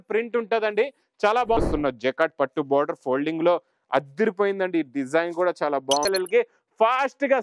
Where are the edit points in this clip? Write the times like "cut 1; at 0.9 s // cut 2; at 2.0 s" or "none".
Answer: cut 1; at 1.6 s // cut 2; at 6.0 s